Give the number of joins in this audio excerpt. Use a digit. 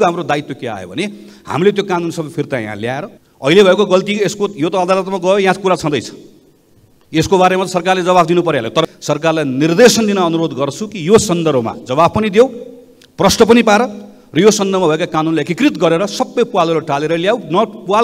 2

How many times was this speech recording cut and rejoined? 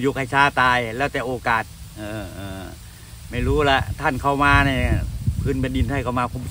0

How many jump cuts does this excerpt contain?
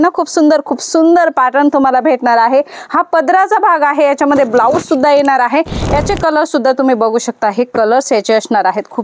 1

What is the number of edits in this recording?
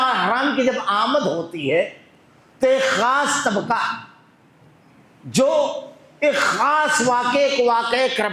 0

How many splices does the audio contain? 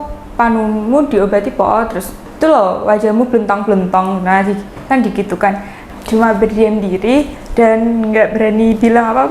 2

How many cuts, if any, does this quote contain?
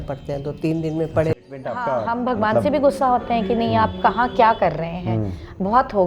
1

